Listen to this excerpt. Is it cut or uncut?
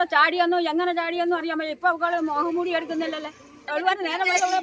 cut